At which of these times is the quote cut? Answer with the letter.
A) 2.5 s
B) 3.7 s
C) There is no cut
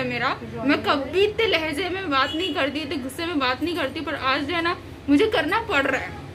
C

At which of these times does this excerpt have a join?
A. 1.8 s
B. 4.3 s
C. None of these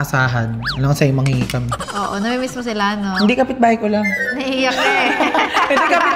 A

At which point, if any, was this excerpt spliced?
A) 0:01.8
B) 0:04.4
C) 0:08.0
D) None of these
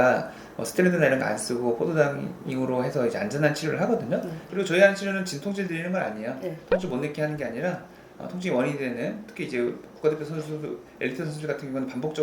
B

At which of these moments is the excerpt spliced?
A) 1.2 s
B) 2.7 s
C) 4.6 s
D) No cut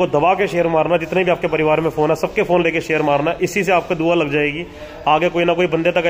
D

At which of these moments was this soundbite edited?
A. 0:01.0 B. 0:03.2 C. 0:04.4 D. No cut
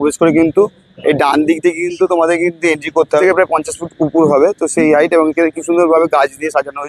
B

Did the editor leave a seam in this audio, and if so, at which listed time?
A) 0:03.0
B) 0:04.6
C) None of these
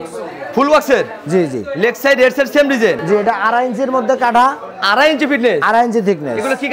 C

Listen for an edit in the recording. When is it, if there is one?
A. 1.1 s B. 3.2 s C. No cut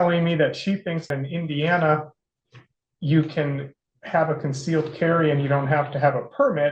A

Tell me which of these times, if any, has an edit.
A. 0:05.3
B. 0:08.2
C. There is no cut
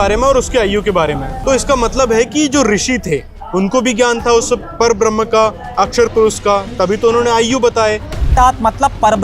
B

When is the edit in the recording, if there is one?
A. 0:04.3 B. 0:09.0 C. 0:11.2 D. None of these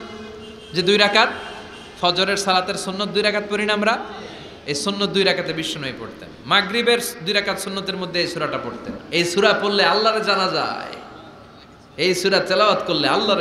B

